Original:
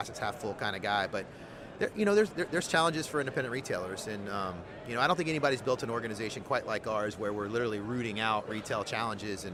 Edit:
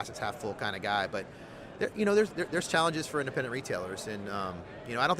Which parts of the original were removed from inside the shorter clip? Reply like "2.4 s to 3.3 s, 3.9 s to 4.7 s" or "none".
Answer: none